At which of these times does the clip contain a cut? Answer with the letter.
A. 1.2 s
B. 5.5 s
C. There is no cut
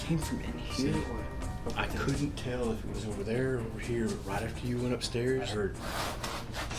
B